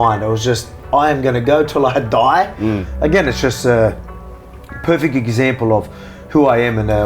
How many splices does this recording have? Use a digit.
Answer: 1